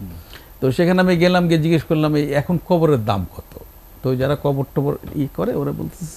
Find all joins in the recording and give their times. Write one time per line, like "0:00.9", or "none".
none